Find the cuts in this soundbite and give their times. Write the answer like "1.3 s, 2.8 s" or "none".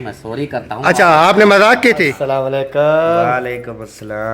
2.1 s